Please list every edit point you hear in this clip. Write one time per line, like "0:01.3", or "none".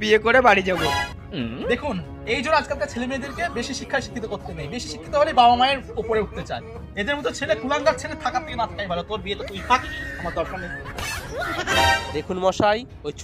0:01.1
0:11.7